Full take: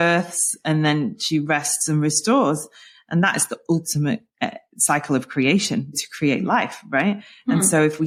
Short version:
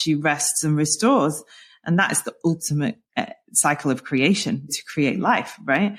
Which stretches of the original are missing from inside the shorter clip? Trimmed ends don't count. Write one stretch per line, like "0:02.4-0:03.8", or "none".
none